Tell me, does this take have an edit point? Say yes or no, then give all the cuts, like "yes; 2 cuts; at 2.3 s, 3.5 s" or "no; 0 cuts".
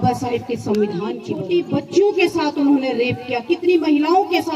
yes; 1 cut; at 1.3 s